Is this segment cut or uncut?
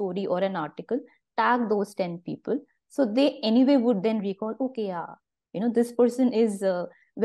uncut